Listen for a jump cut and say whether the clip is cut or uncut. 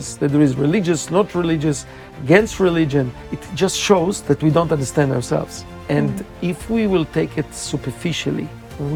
uncut